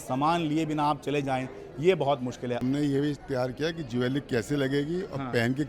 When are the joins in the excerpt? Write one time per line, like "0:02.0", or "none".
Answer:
0:02.6